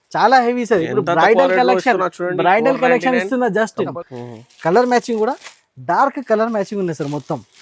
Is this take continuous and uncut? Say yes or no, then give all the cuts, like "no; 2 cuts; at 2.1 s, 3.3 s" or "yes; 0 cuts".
no; 1 cut; at 3.9 s